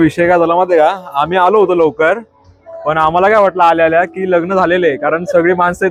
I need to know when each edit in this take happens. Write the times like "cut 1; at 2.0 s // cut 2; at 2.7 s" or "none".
none